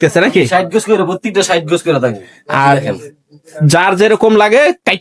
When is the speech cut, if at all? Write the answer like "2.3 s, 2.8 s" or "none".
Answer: none